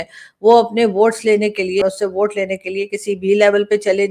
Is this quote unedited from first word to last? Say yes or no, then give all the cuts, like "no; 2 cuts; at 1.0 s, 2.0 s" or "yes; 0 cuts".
no; 1 cut; at 1.8 s